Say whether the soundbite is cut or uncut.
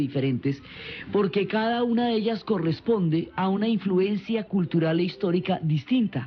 uncut